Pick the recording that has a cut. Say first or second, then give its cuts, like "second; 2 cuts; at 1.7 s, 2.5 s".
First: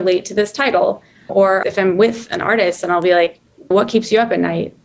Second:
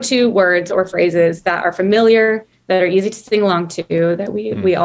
first; 2 cuts; at 1.4 s, 3.7 s